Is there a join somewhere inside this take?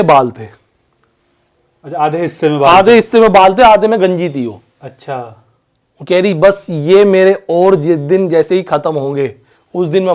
no; 0 cuts

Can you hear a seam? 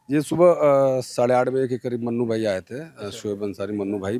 no; 0 cuts

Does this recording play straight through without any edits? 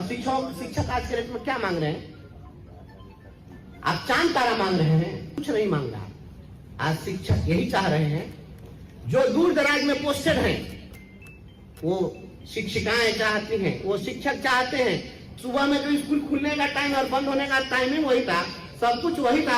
no; 2 cuts; at 5.4 s, 15.2 s

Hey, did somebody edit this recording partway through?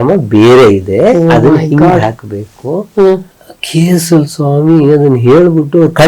no; 0 cuts

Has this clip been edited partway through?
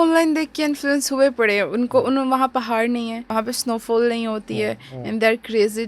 yes; 1 cut; at 3.3 s

